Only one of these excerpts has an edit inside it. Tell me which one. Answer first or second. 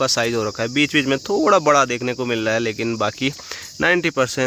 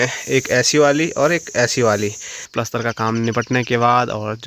second